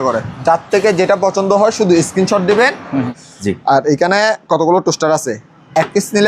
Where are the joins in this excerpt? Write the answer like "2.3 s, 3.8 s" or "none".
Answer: 3.2 s